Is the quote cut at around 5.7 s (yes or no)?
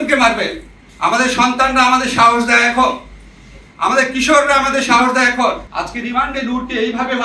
yes